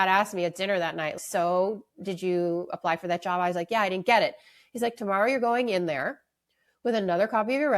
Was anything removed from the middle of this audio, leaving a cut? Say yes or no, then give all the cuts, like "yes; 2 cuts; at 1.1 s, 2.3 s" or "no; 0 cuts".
yes; 1 cut; at 1.2 s